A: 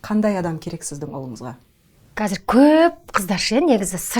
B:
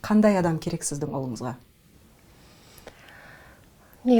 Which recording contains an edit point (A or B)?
A